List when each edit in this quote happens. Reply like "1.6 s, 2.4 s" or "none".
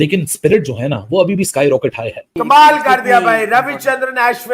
2.2 s